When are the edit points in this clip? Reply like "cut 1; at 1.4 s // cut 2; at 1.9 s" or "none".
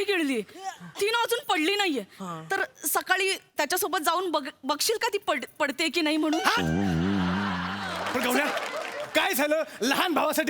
cut 1; at 8.0 s